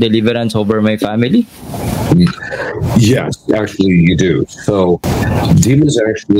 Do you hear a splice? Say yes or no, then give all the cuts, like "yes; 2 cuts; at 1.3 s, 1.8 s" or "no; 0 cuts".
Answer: no; 0 cuts